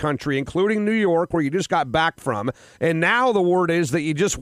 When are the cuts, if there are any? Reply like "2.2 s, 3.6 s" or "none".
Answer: none